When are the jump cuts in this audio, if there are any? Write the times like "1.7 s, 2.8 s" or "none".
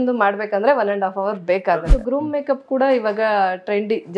1.9 s